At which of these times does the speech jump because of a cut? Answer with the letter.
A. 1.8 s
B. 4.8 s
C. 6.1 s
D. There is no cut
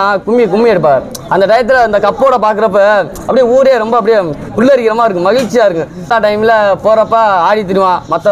C